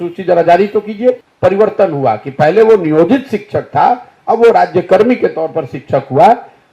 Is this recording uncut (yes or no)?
no